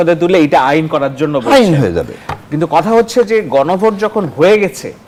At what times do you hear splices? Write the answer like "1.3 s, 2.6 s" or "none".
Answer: none